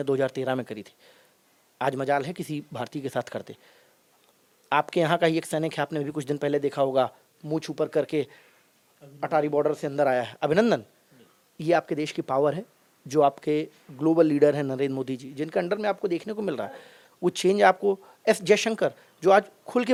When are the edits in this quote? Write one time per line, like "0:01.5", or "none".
none